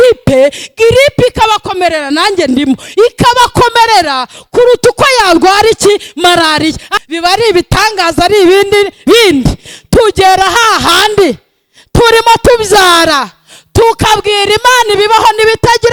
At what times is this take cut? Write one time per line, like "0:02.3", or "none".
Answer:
0:06.9